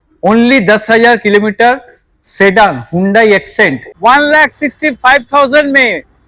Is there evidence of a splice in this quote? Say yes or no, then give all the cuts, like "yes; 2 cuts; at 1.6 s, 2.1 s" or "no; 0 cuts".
yes; 1 cut; at 3.9 s